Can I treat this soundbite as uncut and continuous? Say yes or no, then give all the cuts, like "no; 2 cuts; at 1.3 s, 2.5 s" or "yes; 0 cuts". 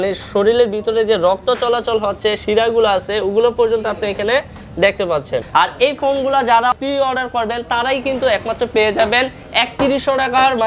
no; 2 cuts; at 5.4 s, 6.8 s